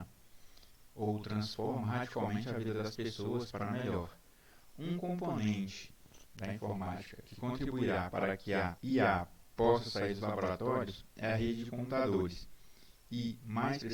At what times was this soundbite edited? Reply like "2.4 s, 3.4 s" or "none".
8.8 s